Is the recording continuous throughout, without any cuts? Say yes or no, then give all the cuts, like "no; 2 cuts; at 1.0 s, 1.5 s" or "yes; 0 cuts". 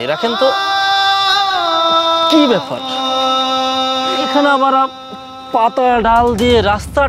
yes; 0 cuts